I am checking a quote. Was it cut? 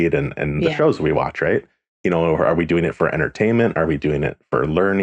no; 0 cuts

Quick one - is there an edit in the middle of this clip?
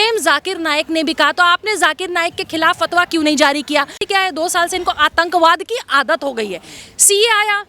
yes; 1 cut; at 4.0 s

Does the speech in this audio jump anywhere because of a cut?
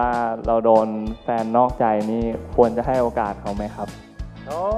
no; 0 cuts

